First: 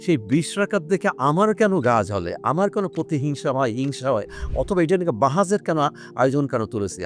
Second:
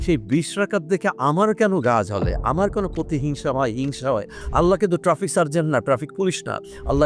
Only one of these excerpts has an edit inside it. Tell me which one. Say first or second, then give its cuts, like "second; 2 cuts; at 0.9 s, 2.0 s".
second; 1 cut; at 4.4 s